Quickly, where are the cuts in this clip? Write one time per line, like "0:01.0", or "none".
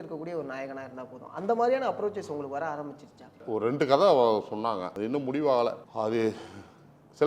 0:03.4
0:04.9
0:05.9

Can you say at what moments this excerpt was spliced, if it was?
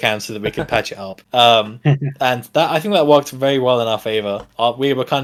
none

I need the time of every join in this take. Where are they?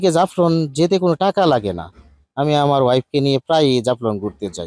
none

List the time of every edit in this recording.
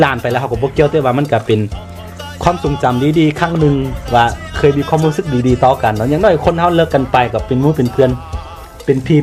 none

